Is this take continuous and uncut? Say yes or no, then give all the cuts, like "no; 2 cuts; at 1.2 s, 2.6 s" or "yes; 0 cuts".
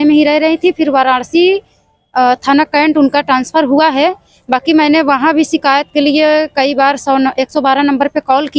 yes; 0 cuts